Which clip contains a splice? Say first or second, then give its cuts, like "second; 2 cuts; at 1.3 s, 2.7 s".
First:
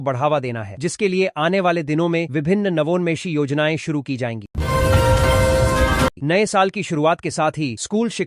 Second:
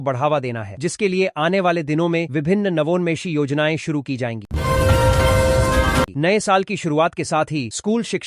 second; 2 cuts; at 4.5 s, 6.1 s